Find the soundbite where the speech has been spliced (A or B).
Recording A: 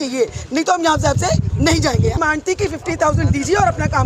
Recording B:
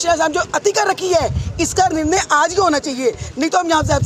A